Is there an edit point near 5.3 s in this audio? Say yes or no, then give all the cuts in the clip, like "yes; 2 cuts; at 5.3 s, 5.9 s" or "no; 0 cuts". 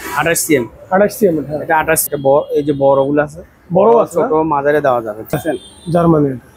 yes; 2 cuts; at 2.0 s, 5.3 s